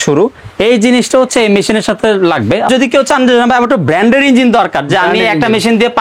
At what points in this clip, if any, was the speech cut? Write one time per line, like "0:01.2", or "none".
0:02.7